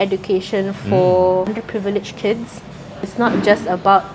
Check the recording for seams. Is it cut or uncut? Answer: cut